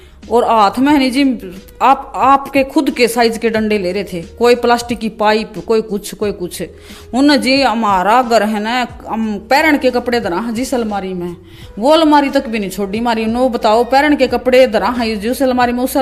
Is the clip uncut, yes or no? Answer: yes